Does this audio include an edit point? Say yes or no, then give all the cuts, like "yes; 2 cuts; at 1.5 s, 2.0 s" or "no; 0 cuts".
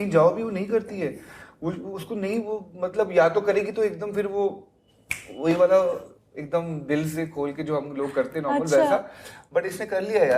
no; 0 cuts